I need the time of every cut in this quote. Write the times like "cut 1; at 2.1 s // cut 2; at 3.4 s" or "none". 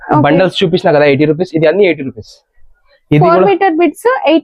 none